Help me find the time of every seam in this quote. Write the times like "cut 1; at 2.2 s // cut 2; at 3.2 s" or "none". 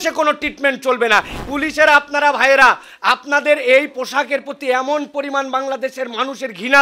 cut 1; at 1.3 s